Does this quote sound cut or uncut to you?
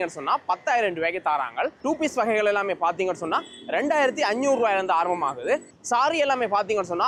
uncut